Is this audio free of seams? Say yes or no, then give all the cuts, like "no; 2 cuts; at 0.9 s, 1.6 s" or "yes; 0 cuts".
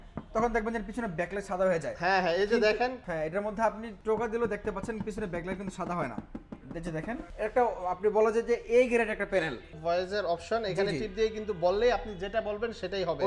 no; 4 cuts; at 3.0 s, 3.9 s, 7.3 s, 9.7 s